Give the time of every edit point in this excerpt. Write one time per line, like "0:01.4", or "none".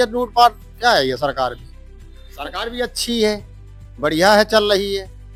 none